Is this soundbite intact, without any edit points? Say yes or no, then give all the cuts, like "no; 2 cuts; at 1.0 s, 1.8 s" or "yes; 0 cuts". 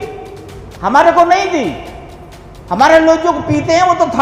yes; 0 cuts